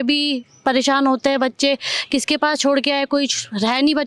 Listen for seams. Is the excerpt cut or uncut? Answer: uncut